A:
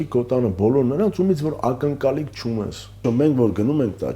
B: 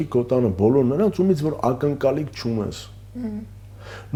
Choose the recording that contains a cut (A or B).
A